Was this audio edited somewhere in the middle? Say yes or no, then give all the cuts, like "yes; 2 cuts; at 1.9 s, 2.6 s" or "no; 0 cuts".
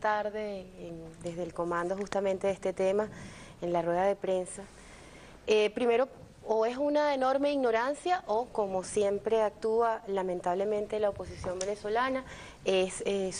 yes; 1 cut; at 5.7 s